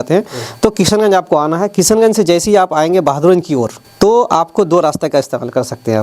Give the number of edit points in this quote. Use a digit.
1